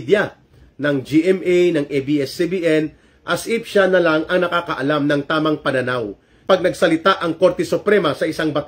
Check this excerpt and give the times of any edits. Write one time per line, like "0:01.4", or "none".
0:06.4

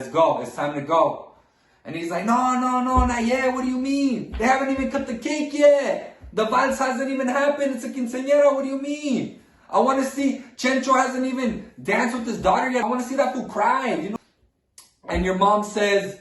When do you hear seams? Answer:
0:12.8
0:14.1

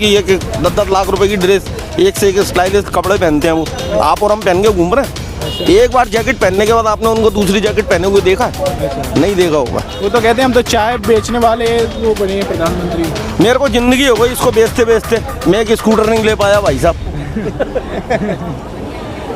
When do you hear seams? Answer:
none

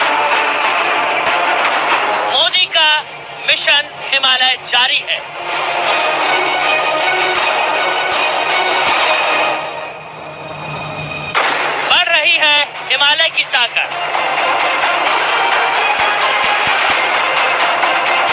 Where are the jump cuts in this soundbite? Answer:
0:16.6

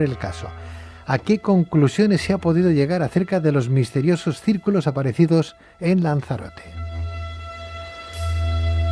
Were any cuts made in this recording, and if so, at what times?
0:07.8

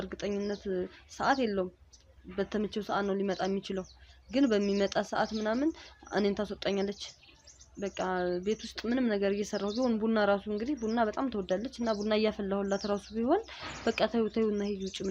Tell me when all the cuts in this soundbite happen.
none

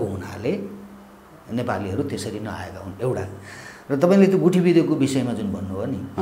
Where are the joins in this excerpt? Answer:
none

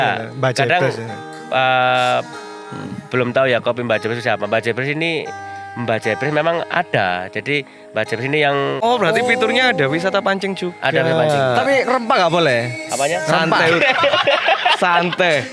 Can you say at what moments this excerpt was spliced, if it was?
0:08.8

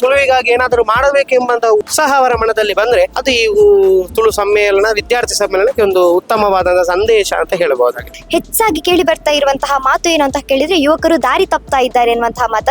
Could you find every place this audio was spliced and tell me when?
0:01.9
0:03.2
0:08.1

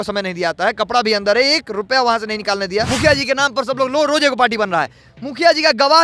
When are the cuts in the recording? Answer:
0:02.9

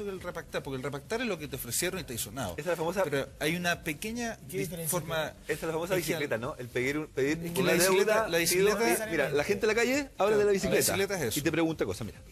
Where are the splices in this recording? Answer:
0:10.9

